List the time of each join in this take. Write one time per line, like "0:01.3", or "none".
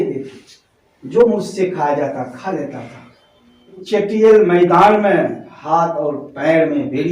0:03.8